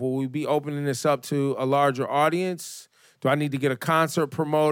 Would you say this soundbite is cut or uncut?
cut